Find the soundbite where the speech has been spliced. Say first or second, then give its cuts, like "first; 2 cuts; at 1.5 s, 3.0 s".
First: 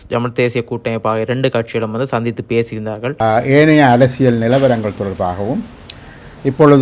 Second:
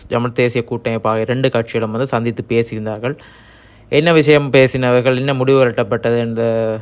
first; 1 cut; at 3.2 s